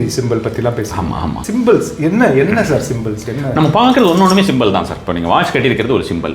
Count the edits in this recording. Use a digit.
1